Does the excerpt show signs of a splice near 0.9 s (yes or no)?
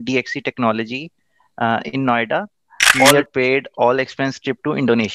no